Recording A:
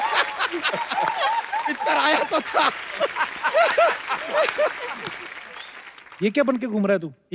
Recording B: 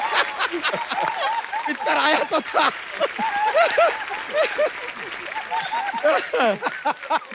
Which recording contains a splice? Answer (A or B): A